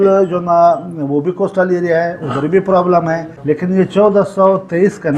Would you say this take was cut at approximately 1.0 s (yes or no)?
no